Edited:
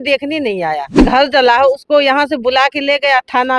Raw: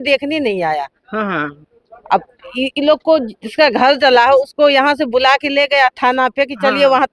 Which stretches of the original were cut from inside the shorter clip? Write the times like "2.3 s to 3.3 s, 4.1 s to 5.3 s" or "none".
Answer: 1.0 s to 3.7 s